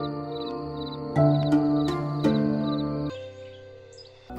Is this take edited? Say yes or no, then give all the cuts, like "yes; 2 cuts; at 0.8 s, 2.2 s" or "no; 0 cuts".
yes; 1 cut; at 3.1 s